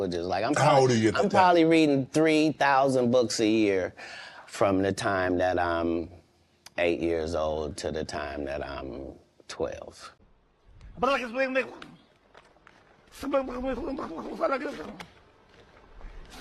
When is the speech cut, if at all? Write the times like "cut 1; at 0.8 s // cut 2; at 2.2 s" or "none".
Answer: none